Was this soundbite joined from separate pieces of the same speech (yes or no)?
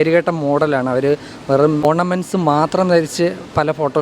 yes